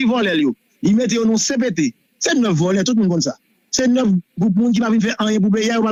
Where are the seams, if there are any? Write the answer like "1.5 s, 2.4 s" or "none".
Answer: none